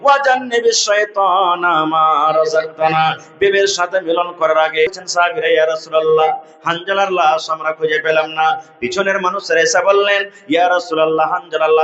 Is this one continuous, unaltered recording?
no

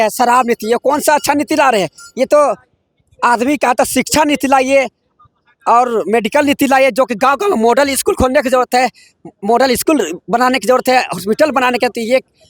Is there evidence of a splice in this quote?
no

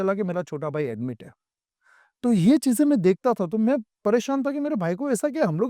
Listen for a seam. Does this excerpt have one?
no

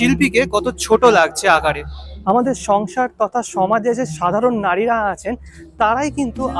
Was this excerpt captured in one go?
no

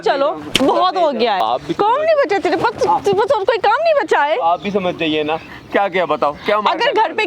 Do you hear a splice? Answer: yes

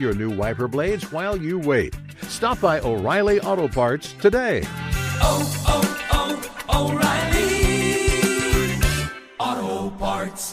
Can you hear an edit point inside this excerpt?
no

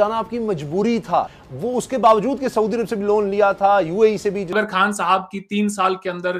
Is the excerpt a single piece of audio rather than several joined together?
no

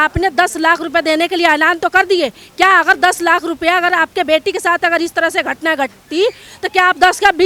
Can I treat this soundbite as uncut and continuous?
yes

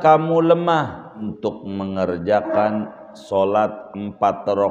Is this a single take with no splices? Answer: no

